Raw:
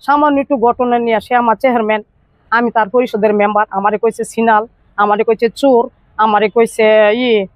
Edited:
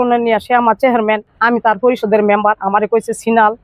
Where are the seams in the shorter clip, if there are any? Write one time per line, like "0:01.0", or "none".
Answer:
0:01.3